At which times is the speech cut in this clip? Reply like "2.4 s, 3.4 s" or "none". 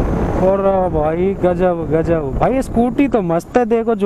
none